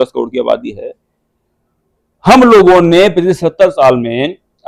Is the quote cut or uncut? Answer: uncut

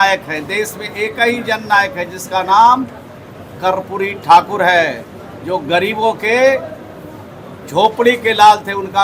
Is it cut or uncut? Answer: uncut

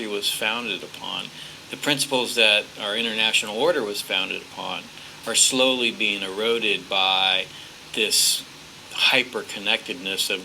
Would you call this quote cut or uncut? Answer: cut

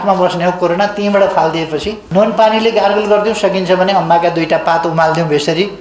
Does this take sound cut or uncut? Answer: cut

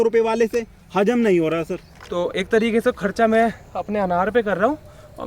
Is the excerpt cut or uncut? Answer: cut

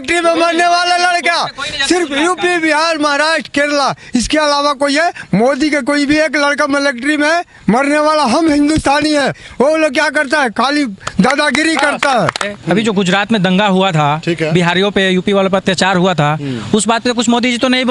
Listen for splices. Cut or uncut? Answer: cut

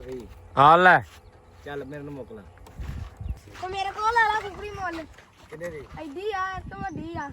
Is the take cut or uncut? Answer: cut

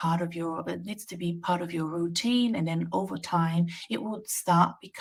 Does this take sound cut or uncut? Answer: uncut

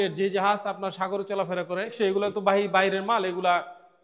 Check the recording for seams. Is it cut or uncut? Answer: cut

